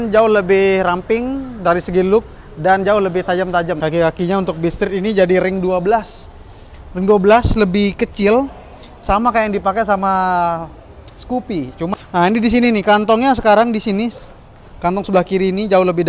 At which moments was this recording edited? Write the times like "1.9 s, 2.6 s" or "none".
3.8 s, 11.9 s

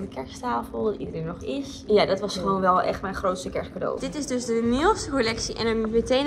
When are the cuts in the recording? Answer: 1.8 s, 4.0 s

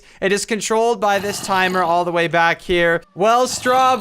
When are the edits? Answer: 3.1 s

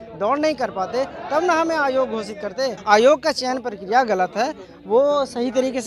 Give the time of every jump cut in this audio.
2.8 s

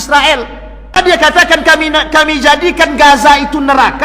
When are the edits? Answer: 1.0 s

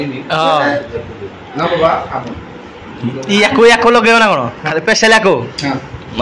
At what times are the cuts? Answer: none

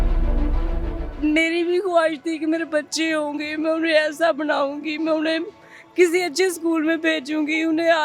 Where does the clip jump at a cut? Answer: 1.0 s

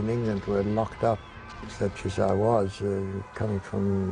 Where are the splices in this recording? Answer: 1.6 s

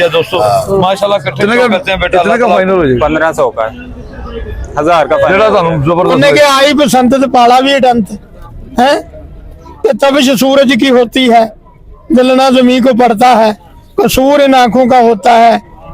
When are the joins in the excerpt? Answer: 2.4 s, 5.2 s

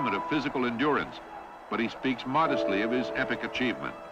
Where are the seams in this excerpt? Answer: none

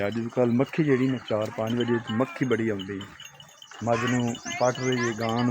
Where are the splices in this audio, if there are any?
none

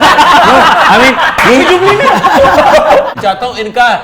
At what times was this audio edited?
3.1 s

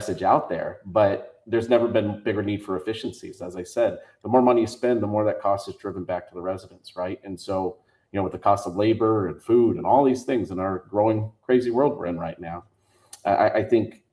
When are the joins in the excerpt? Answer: none

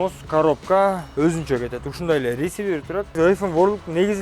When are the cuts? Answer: 3.1 s

